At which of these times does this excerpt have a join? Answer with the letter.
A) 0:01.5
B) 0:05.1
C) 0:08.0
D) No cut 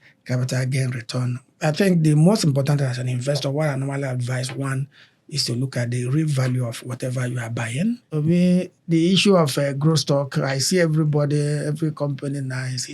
C